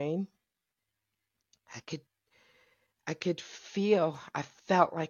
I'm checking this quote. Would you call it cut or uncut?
uncut